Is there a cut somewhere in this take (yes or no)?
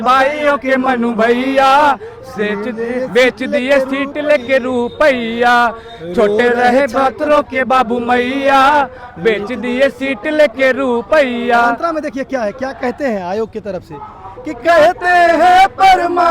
no